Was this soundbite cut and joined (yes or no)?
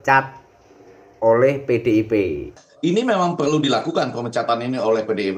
yes